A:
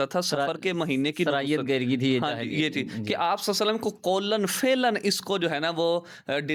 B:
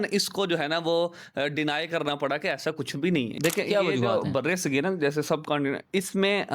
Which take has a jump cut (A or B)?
B